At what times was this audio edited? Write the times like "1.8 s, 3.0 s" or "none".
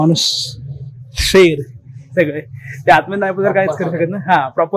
none